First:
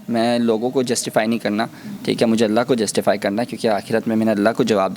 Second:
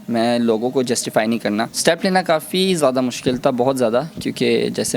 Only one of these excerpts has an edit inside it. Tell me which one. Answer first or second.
second